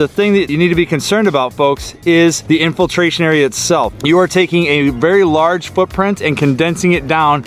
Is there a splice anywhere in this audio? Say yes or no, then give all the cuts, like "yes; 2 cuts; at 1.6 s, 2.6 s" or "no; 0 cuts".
no; 0 cuts